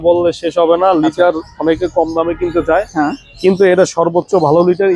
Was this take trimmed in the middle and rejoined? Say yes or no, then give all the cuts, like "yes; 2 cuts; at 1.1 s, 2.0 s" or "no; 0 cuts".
no; 0 cuts